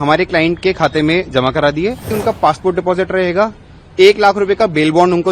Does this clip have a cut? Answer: yes; 1 cut; at 2.1 s

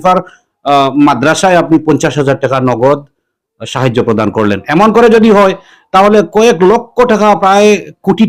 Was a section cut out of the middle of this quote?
no; 0 cuts

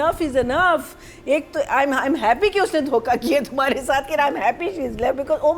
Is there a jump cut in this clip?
no; 0 cuts

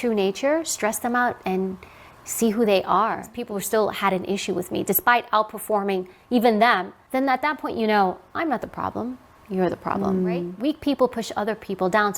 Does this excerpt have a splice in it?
yes; 3 cuts; at 3.3 s, 6.9 s, 10.5 s

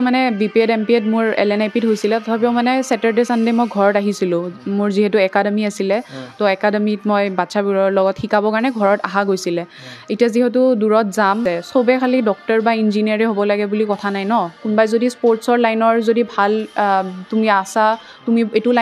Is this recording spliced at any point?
yes; 1 cut; at 11.4 s

